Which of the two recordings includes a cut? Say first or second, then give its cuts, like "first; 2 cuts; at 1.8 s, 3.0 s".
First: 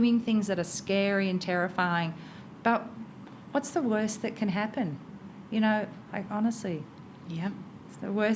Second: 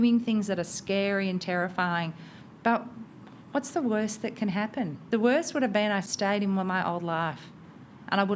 second; 2 cuts; at 5.0 s, 6.1 s